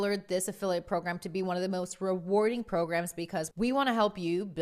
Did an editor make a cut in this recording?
yes; 1 cut; at 3.5 s

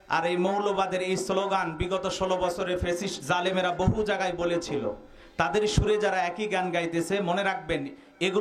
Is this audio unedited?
yes; 0 cuts

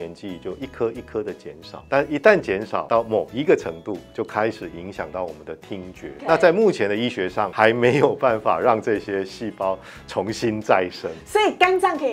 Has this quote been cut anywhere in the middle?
yes; 4 cuts; at 1.7 s, 2.8 s, 6.2 s, 7.4 s

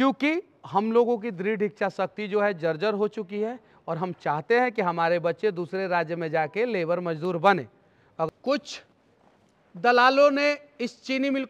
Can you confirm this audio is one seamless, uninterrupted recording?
no; 1 cut; at 8.3 s

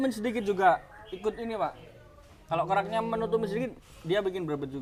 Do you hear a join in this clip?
no; 0 cuts

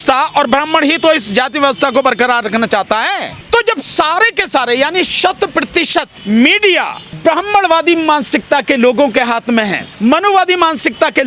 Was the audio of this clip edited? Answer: yes; 4 cuts; at 3.3 s, 6.1 s, 7.0 s, 9.8 s

